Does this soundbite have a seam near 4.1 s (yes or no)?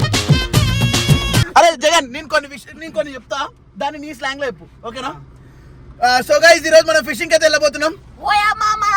no